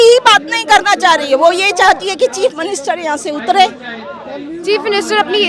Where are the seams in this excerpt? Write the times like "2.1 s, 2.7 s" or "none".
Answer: none